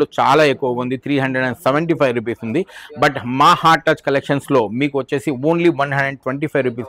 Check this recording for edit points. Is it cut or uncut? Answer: uncut